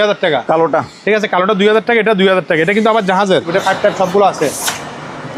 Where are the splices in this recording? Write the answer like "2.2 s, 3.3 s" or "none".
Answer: 3.5 s

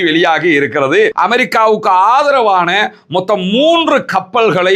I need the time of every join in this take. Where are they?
1.1 s

